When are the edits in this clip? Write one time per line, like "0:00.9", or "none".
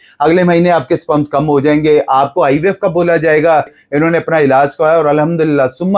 0:03.8